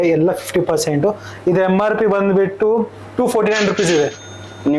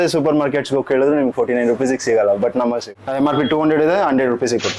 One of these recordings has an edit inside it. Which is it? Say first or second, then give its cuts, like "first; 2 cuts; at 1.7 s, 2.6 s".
second; 1 cut; at 2.6 s